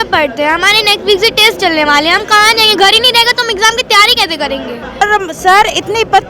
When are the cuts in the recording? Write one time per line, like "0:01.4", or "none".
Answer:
0:05.0